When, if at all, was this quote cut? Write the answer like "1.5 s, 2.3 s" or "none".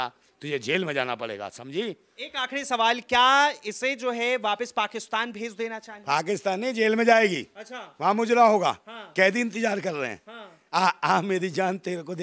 none